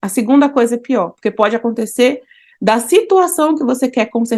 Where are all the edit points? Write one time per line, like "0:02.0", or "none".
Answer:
none